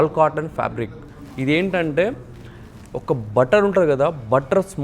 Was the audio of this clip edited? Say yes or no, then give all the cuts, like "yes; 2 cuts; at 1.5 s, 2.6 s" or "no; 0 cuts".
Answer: no; 0 cuts